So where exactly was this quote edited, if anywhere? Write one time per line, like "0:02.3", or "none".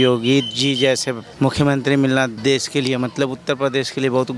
0:01.2
0:02.3

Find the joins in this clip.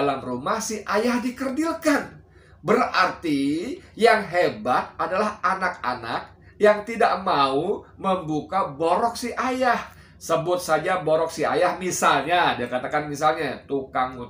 0:09.9

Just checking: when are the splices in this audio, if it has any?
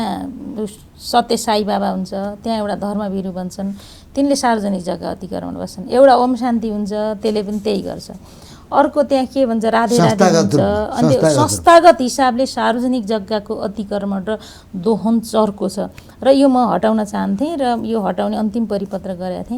none

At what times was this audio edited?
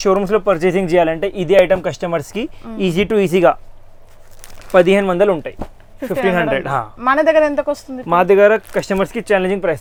none

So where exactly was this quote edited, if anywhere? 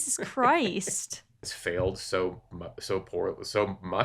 0:01.5

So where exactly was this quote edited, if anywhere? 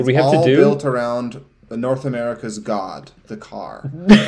none

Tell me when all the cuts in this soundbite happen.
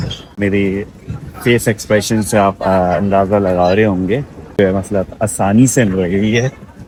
none

